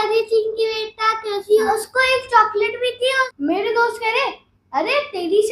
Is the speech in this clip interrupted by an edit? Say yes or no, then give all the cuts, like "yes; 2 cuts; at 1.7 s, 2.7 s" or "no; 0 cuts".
yes; 2 cuts; at 1.7 s, 3.3 s